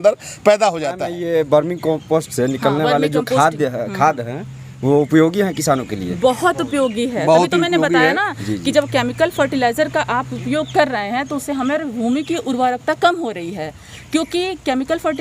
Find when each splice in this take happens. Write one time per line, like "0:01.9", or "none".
0:01.1